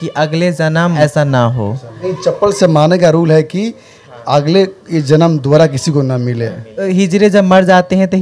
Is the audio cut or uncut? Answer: cut